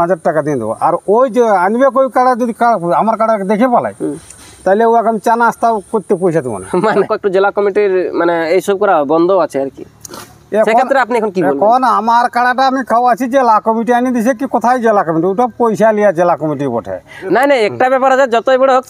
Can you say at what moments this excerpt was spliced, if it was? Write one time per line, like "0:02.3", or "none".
0:07.0
0:17.1